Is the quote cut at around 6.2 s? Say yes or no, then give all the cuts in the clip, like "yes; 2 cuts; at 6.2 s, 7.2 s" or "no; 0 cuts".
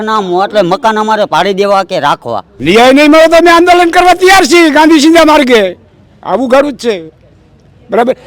no; 1 cut; at 2.5 s